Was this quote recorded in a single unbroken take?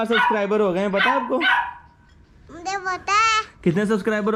yes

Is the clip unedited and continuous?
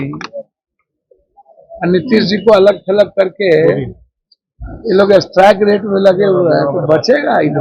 yes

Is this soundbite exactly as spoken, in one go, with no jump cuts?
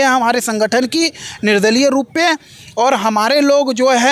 yes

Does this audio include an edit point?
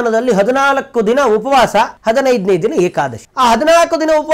yes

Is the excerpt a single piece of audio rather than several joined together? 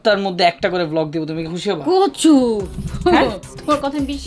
yes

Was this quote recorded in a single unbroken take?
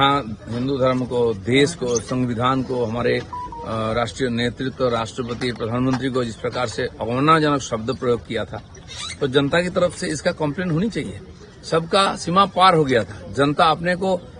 yes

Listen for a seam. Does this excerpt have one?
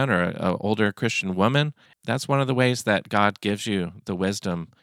yes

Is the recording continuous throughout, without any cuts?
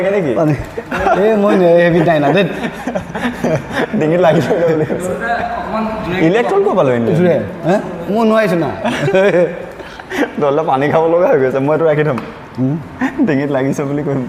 yes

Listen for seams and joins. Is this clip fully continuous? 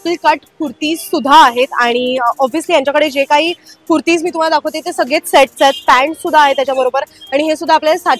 yes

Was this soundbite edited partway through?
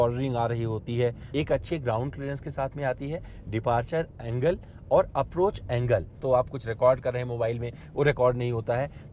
yes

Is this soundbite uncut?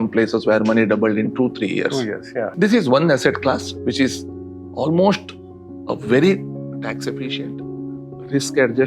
no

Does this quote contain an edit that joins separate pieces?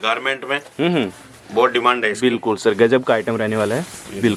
no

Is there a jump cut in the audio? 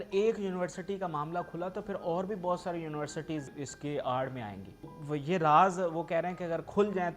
yes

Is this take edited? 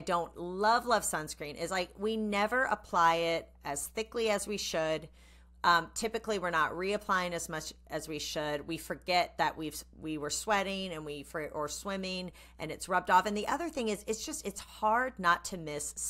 no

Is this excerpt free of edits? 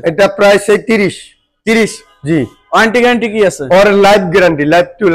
yes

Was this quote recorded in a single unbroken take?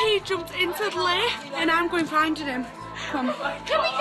no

